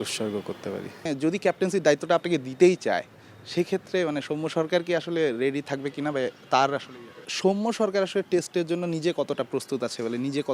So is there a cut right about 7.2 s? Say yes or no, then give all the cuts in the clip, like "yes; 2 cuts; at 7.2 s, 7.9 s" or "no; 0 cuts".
yes; 2 cuts; at 1.0 s, 7.2 s